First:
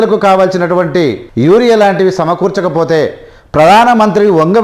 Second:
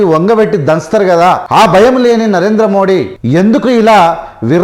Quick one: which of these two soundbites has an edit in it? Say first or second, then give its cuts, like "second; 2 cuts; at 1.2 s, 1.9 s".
second; 2 cuts; at 1.4 s, 3.1 s